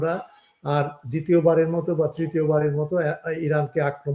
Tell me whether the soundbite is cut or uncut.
uncut